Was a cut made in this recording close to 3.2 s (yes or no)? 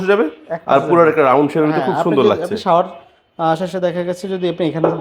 no